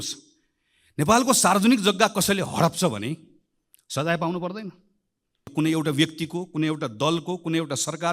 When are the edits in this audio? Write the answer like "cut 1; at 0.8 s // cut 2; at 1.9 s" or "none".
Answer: cut 1; at 5.5 s